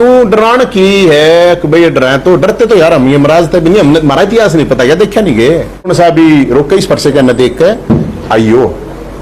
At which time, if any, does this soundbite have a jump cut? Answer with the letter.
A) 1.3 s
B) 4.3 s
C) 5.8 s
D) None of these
C